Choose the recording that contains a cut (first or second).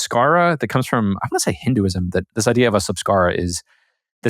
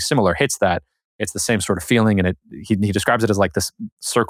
first